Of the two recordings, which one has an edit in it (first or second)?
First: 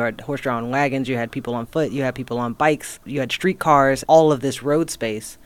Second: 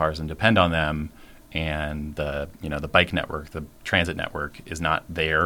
first